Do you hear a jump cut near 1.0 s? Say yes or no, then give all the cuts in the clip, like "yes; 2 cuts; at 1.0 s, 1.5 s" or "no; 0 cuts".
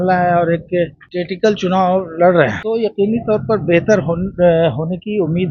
yes; 2 cuts; at 1.0 s, 2.6 s